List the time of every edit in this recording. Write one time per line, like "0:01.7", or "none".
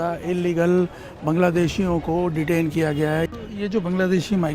0:03.3